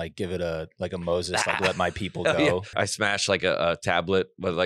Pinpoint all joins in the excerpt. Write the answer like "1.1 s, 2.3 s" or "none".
2.7 s